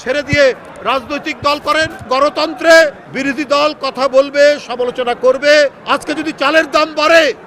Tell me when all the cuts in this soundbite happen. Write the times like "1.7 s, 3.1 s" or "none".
2.1 s, 3.1 s, 5.8 s

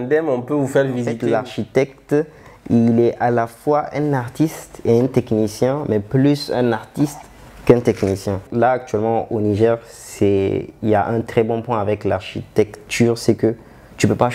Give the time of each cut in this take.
1.2 s, 8.4 s

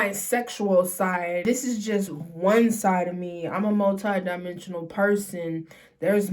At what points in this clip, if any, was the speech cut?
1.4 s

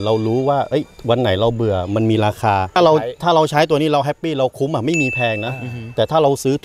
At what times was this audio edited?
2.8 s

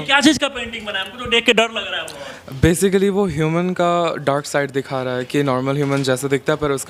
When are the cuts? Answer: none

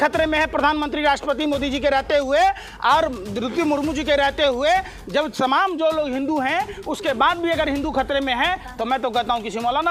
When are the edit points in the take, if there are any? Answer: none

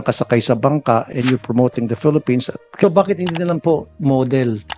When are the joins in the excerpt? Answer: 2.8 s

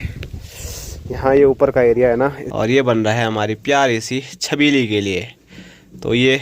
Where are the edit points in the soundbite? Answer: 2.4 s

